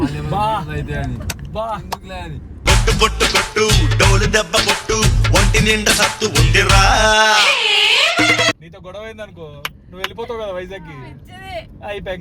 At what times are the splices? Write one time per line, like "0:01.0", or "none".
0:08.6